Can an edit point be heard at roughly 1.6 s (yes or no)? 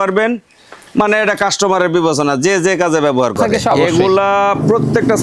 no